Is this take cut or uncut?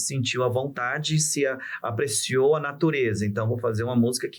uncut